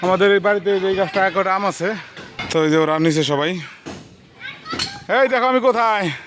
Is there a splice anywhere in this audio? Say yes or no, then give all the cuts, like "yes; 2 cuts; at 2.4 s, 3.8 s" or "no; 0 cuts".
yes; 1 cut; at 2.4 s